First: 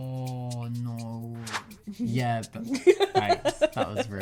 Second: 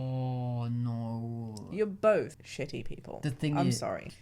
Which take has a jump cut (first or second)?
first